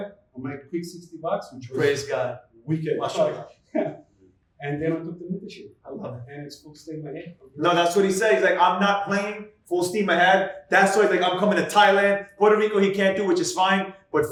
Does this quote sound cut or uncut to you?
uncut